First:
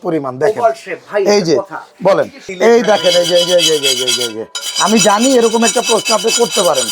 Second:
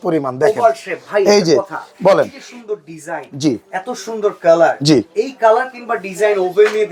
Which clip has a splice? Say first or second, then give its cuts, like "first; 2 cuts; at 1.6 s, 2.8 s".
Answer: first; 1 cut; at 2.5 s